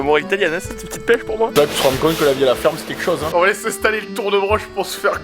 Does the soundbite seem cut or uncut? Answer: cut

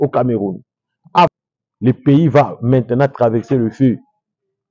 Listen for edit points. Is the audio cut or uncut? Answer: cut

